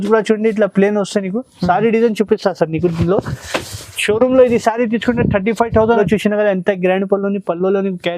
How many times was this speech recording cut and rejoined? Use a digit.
1